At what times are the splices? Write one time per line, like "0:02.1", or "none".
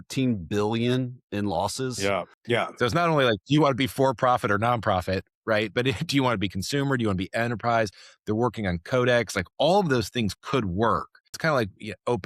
0:02.3
0:11.3